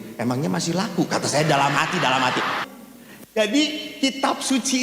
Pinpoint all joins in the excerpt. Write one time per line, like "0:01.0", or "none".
0:02.7